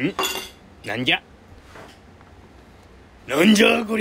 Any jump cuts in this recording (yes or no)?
yes